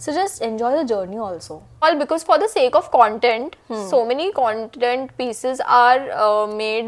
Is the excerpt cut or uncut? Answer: cut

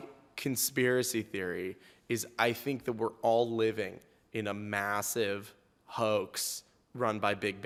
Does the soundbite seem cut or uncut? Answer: uncut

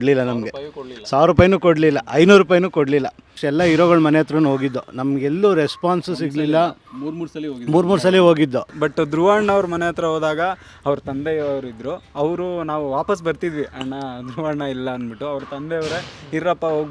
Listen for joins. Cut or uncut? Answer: cut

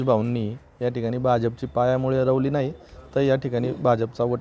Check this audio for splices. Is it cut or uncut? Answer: uncut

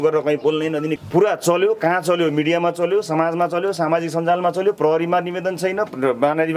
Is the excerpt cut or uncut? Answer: cut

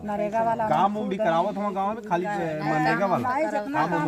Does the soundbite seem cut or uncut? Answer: uncut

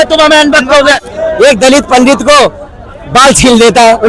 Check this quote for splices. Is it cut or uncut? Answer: cut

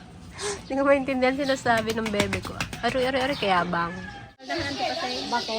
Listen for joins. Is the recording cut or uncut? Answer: cut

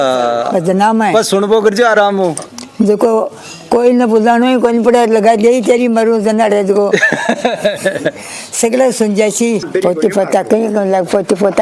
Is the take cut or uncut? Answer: cut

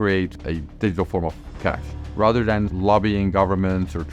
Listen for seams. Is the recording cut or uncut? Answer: cut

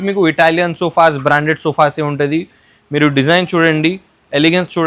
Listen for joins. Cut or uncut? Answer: uncut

